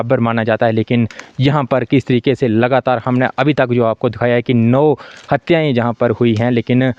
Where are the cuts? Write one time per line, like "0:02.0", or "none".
none